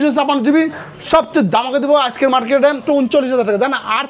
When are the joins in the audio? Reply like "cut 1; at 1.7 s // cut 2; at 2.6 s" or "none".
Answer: cut 1; at 2.8 s